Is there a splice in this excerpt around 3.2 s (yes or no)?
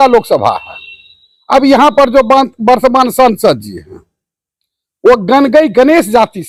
no